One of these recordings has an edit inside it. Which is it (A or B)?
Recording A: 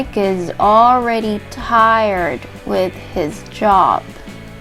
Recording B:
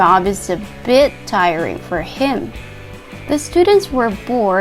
B